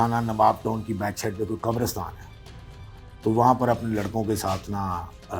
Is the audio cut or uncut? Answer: uncut